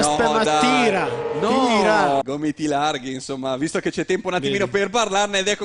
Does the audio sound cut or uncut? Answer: cut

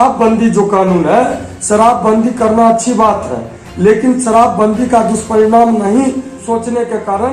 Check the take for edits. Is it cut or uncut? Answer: cut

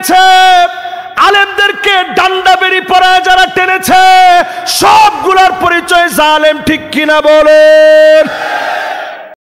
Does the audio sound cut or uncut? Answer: uncut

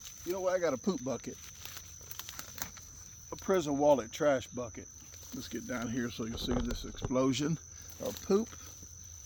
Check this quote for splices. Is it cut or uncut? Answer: uncut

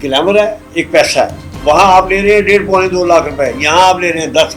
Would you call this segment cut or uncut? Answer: uncut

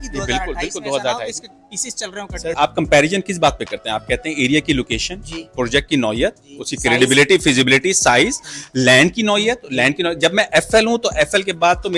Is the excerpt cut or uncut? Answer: cut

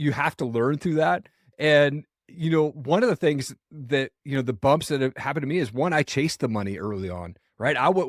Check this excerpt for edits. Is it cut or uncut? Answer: uncut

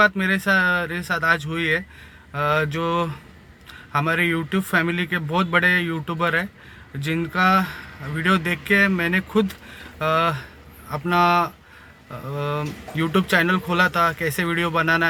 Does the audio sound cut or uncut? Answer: uncut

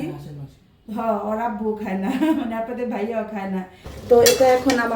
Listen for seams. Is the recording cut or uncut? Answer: cut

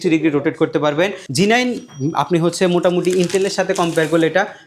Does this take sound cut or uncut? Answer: cut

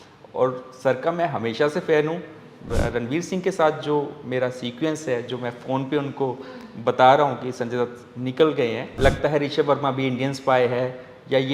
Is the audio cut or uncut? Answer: cut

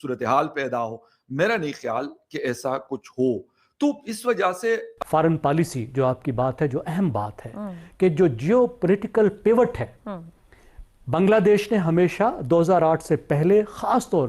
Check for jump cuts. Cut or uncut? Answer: cut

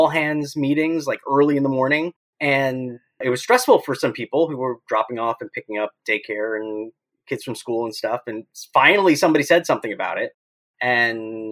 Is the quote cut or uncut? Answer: cut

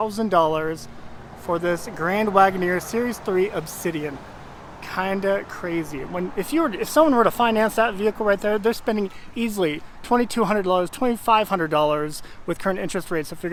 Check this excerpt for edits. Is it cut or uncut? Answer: uncut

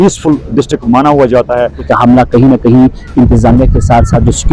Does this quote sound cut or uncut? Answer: cut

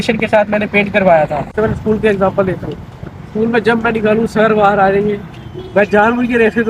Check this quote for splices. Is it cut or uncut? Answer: cut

